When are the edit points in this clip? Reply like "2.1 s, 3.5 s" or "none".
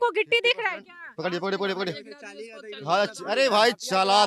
none